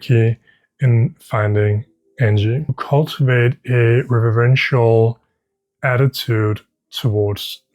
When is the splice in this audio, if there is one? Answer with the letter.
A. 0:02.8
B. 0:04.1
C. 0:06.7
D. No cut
A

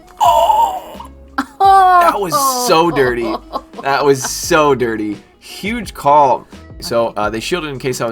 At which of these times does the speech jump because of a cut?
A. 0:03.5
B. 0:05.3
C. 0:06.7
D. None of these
C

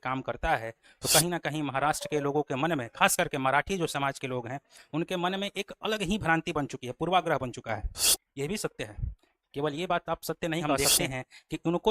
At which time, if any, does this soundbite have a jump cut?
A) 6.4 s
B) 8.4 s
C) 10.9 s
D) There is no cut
C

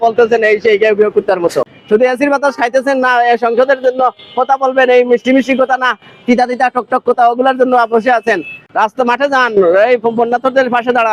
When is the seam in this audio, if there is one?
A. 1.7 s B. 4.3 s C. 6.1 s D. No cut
A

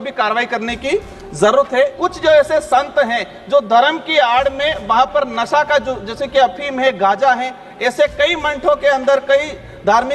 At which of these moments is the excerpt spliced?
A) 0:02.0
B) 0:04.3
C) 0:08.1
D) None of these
A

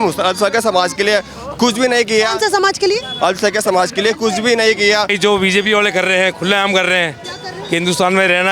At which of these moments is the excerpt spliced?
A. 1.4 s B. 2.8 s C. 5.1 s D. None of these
C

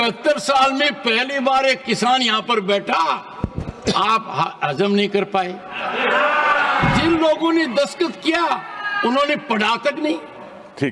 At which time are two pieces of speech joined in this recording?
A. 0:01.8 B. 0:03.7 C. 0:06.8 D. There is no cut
C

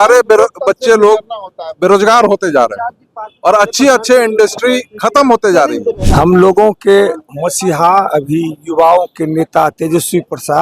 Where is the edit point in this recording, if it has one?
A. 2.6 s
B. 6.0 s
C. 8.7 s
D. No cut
B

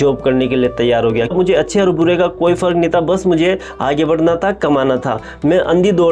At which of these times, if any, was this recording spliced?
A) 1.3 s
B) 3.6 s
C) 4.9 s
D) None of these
A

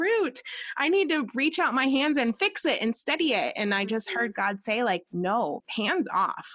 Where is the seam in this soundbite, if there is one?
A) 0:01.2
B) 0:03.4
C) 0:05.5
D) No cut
C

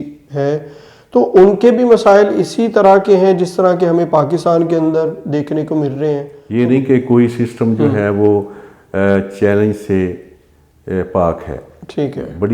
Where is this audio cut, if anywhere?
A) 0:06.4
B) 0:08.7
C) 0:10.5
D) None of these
A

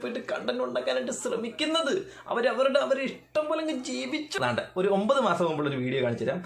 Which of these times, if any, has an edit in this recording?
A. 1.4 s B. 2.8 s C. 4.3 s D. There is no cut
C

